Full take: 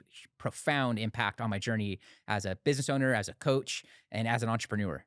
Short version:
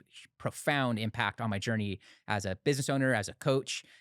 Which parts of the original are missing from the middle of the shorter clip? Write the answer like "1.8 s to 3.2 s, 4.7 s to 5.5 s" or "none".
none